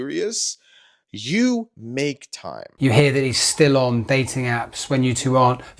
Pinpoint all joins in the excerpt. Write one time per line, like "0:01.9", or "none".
0:02.6